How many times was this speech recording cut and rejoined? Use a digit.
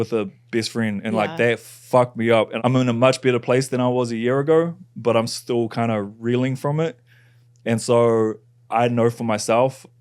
1